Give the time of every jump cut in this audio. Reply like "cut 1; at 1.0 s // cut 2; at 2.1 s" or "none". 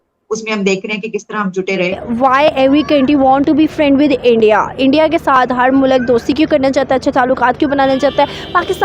cut 1; at 2.0 s